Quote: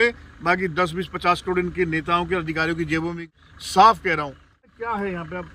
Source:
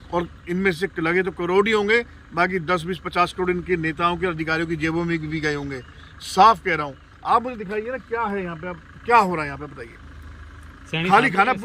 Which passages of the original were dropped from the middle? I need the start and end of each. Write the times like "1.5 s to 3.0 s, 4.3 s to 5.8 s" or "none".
5.2 s to 5.9 s, 7.2 s to 7.9 s